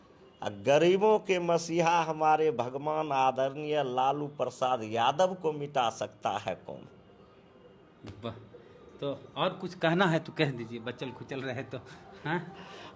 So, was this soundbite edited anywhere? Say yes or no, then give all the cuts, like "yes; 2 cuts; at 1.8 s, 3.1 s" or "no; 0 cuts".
no; 0 cuts